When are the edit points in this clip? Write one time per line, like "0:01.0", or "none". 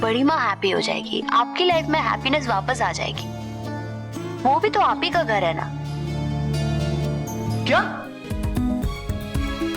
0:07.6